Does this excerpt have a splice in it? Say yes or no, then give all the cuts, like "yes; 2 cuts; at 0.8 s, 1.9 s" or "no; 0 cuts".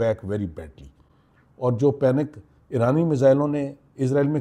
no; 0 cuts